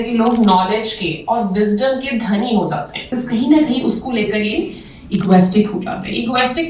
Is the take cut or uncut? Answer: cut